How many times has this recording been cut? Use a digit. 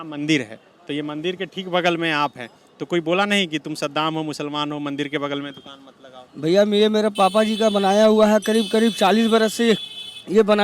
0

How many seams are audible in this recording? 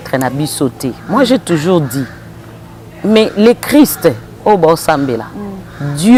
0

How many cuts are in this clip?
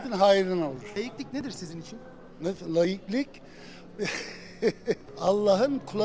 2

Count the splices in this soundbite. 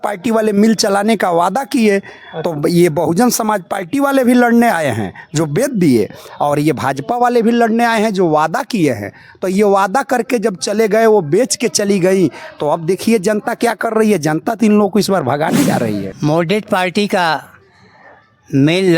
1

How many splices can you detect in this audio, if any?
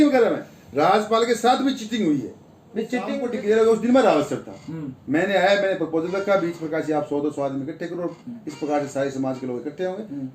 1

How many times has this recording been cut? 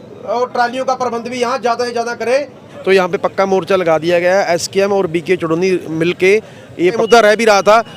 2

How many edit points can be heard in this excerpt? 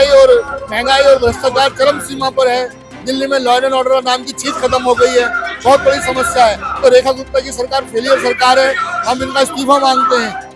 0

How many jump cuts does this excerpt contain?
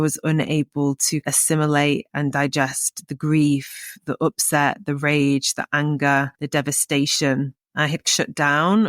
3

